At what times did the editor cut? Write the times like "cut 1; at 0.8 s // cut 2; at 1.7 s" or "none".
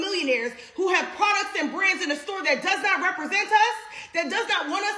none

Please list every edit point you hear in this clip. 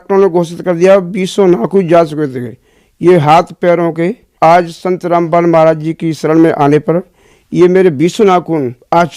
cut 1; at 4.2 s

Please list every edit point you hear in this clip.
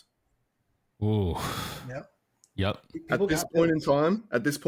none

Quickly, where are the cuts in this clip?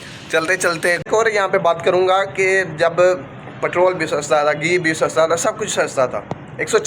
cut 1; at 1.0 s

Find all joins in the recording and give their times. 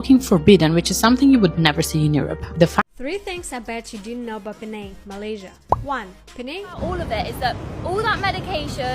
cut 1; at 2.8 s // cut 2; at 6.8 s

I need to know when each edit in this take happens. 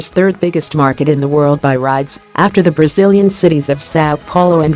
none

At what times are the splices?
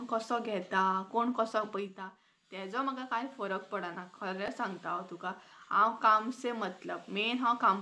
none

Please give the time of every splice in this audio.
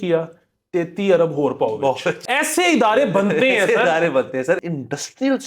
cut 1; at 2.1 s // cut 2; at 4.7 s

